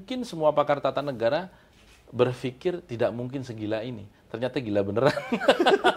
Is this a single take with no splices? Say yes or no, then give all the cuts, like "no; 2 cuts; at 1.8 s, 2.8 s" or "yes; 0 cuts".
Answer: yes; 0 cuts